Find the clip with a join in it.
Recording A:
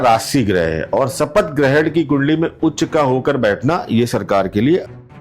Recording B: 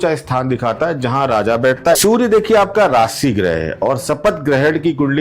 B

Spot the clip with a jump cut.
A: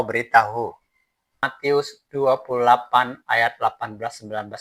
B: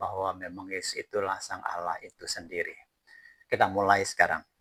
A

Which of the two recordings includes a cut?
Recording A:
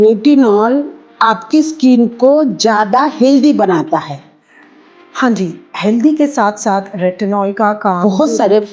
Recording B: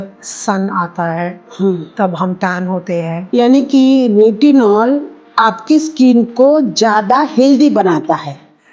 B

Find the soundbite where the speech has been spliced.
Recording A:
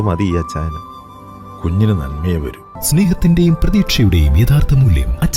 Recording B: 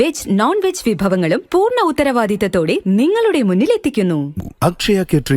B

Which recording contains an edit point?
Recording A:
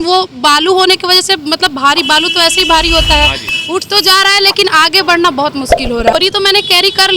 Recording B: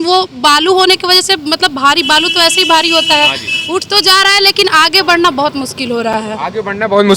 A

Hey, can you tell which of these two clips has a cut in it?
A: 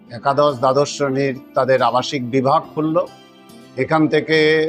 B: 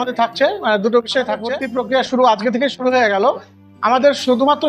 B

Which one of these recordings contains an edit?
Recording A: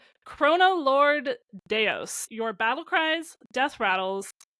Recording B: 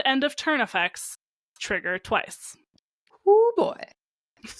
A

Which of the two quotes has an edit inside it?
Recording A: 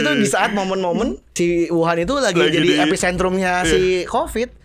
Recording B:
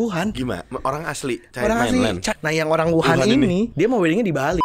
B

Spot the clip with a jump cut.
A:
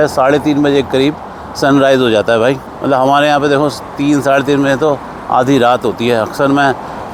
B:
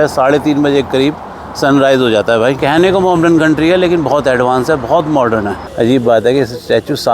B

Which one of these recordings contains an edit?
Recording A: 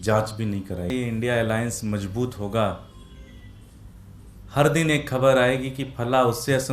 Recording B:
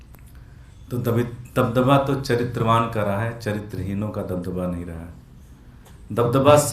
A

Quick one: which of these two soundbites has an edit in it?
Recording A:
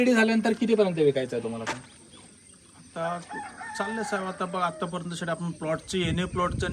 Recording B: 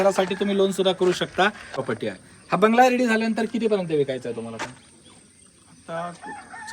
B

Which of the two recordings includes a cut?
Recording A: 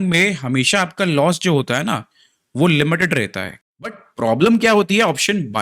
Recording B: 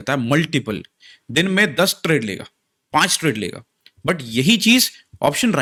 A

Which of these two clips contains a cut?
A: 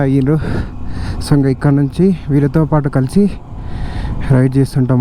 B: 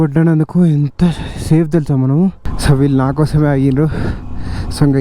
B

